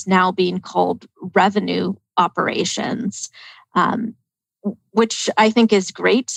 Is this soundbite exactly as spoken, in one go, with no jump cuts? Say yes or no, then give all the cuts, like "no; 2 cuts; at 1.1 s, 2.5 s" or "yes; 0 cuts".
yes; 0 cuts